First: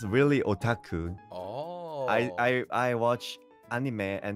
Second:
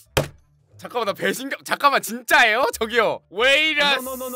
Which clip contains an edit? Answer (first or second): first